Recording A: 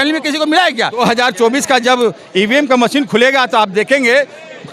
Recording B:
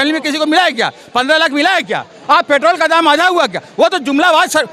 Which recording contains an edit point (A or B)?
A